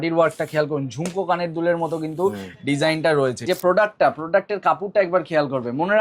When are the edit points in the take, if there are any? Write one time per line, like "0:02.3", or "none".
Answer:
0:03.4

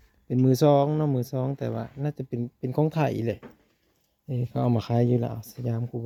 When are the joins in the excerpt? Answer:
none

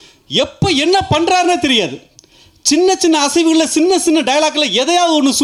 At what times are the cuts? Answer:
none

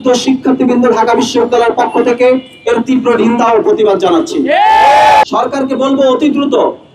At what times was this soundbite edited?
0:05.2

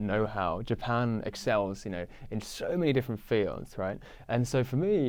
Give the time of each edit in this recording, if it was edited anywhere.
none

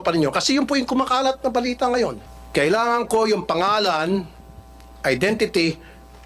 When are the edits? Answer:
0:02.2

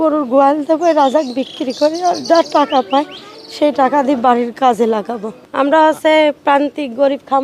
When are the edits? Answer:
0:05.4

